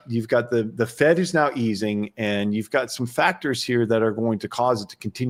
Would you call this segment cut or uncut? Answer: uncut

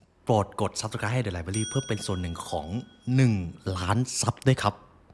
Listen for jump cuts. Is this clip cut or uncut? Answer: uncut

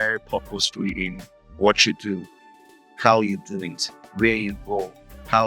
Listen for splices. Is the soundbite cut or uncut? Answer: uncut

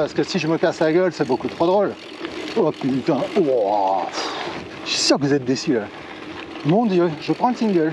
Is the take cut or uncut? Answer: uncut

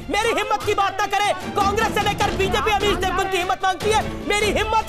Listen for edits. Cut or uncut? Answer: uncut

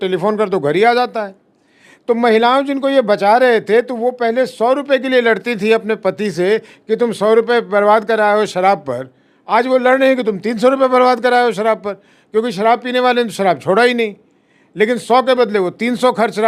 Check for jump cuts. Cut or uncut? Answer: uncut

